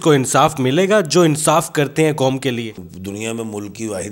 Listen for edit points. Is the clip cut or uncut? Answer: cut